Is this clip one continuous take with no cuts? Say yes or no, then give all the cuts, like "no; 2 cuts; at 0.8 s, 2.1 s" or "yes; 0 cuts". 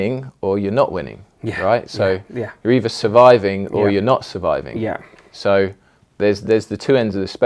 yes; 0 cuts